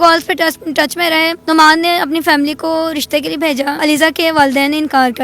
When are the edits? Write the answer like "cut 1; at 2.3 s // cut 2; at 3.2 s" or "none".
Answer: cut 1; at 1.4 s // cut 2; at 3.8 s